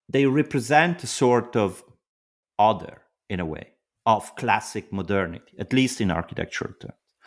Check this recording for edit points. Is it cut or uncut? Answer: uncut